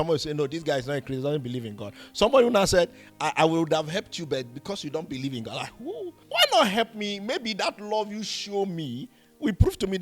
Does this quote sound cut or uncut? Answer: cut